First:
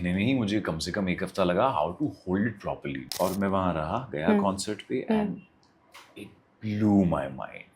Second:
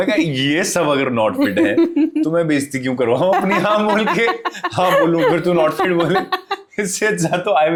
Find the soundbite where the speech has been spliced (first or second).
first